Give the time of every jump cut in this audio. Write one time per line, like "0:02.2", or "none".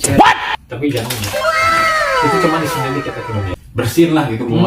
0:03.5